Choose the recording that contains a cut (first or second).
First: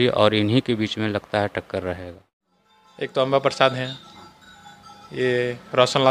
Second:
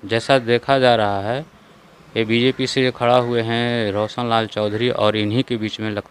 first